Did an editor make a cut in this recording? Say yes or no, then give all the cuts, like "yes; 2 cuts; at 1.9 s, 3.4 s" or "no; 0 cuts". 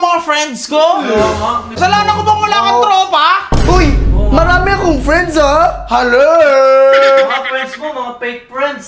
yes; 1 cut; at 1.8 s